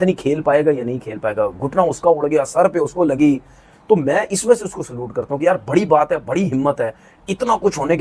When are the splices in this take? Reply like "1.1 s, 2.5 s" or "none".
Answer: none